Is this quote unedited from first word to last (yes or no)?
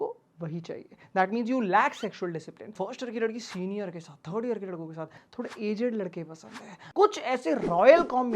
no